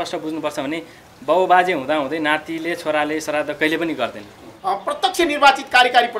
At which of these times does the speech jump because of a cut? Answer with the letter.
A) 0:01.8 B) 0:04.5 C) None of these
B